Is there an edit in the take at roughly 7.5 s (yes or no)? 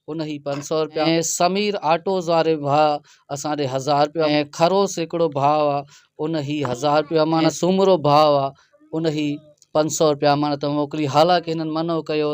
yes